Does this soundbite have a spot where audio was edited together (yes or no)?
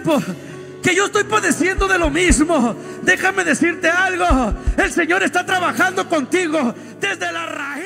no